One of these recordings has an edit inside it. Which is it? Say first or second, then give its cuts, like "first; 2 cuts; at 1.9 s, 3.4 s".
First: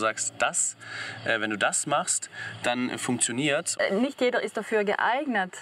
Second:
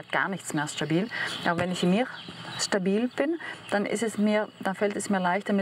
first; 1 cut; at 3.7 s